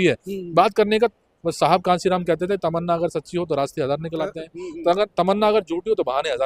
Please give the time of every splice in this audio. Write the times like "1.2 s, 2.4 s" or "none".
none